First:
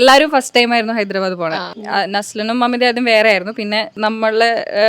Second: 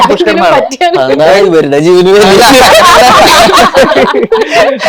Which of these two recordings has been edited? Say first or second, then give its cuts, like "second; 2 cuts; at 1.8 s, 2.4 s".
first; 2 cuts; at 1.7 s, 3.9 s